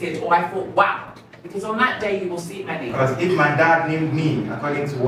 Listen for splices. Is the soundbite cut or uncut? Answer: cut